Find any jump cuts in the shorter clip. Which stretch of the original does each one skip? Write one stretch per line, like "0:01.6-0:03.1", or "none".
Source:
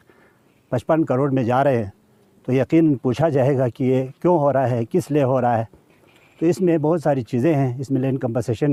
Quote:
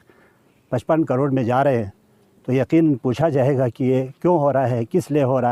none